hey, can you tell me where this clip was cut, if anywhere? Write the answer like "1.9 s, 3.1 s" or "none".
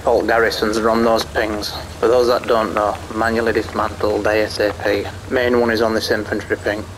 5.2 s